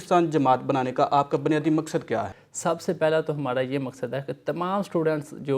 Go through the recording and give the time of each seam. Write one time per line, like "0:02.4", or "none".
0:02.4